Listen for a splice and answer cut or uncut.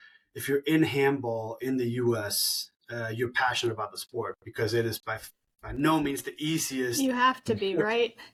uncut